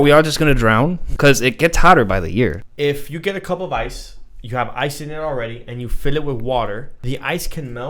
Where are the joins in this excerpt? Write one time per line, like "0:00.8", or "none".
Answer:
0:01.0
0:02.6
0:06.9